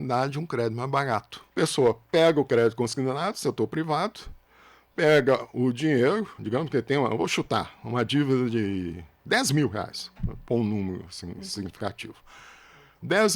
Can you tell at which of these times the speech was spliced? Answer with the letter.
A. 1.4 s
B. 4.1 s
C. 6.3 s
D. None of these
A